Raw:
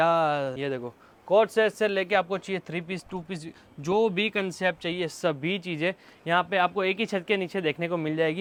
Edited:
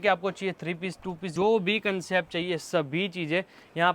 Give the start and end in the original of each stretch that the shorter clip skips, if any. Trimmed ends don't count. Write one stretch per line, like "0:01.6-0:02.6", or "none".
0:03.3-0:03.7

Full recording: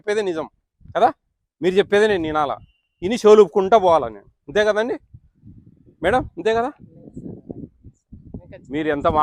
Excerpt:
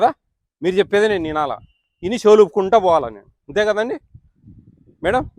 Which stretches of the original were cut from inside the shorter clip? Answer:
none

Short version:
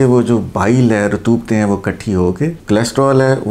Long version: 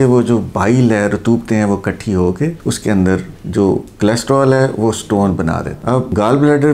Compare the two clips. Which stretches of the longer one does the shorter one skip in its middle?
0:02.6-0:03.9

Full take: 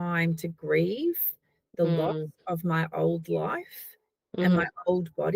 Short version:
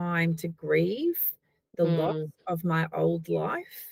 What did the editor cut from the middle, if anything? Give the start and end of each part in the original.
none

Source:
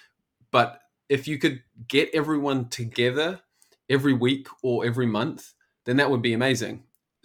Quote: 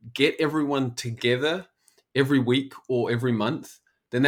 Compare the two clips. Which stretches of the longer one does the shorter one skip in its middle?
none

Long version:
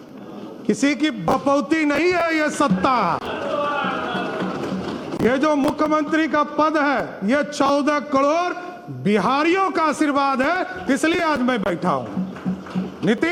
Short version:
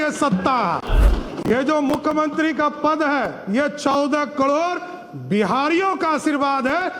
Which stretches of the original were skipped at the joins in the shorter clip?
0:03.5-0:04.8

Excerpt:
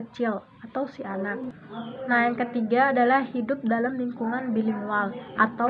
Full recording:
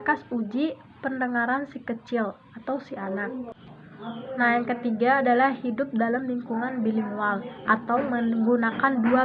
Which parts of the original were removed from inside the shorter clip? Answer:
0:03.5-0:03.9

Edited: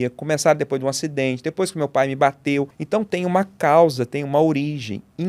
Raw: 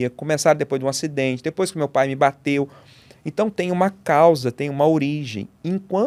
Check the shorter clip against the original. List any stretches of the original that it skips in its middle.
0:02.8-0:03.2

